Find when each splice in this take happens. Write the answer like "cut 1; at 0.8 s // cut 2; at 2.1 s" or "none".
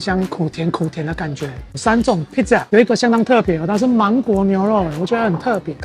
cut 1; at 1.7 s